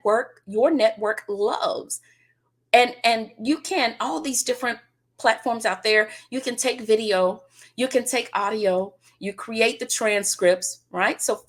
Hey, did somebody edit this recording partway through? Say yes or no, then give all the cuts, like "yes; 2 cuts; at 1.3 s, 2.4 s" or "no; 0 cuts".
no; 0 cuts